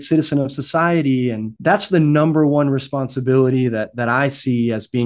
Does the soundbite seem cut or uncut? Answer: cut